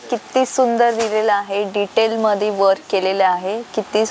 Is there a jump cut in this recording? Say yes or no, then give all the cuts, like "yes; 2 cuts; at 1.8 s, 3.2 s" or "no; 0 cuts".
no; 0 cuts